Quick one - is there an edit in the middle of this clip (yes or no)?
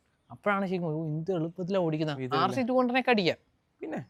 no